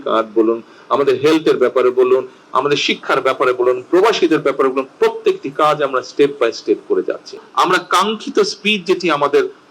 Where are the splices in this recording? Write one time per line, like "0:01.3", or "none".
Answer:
0:07.4

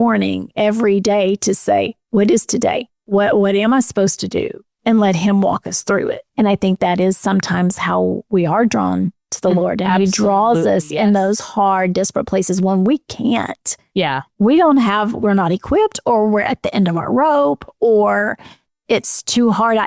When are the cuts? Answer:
0:02.9
0:04.7
0:06.3

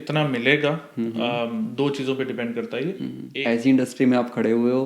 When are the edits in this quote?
0:03.2

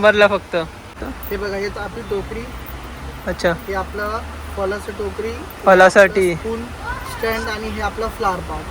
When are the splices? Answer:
0:01.0

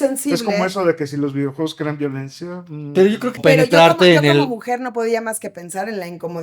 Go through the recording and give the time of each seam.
0:03.4

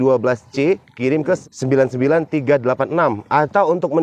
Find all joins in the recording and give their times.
0:01.4

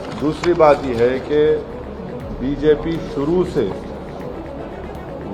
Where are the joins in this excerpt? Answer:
none

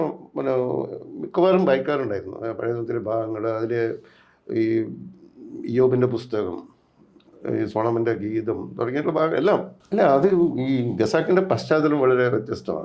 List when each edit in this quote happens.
0:09.8

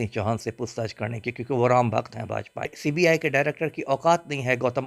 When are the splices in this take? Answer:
0:02.8

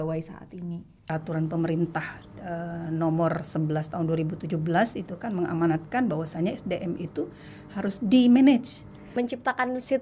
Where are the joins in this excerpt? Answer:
0:00.9
0:08.9

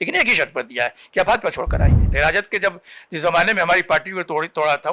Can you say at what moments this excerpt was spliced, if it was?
0:02.1

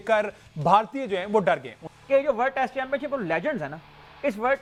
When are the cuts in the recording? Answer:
none

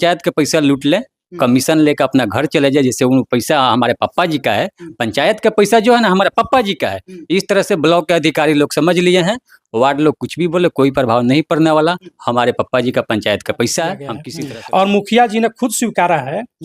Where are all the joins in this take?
0:14.2

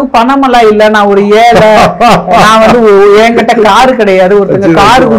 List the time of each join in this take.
none

